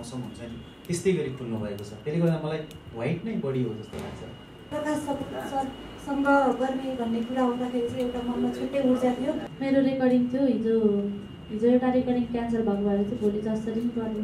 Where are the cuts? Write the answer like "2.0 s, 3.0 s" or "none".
4.7 s, 9.5 s

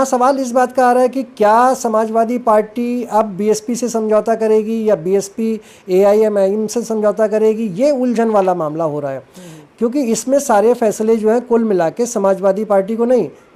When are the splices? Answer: none

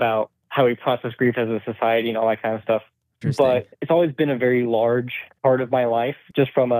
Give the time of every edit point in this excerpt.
3.2 s

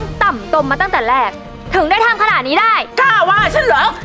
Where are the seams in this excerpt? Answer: 2.9 s

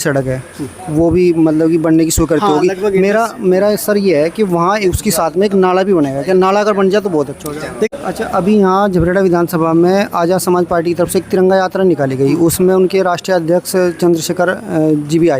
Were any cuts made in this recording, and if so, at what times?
7.9 s

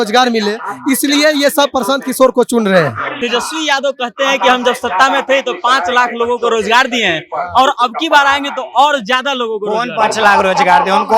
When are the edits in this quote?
3.2 s

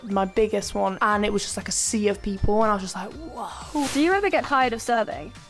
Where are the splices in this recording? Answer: 3.9 s

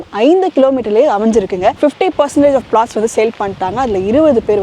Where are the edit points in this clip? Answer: 1.8 s

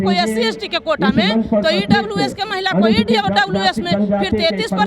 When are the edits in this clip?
none

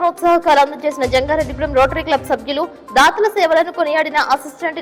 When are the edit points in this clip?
none

